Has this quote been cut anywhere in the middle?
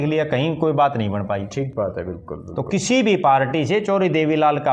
no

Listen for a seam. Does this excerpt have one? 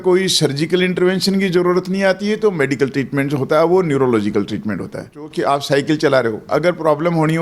yes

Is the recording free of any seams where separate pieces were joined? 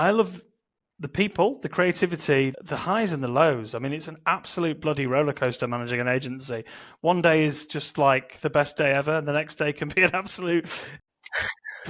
yes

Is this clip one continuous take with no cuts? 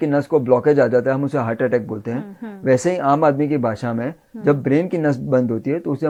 yes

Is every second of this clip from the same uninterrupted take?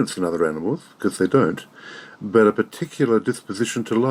yes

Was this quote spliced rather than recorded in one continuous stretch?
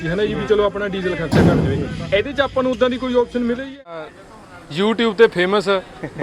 yes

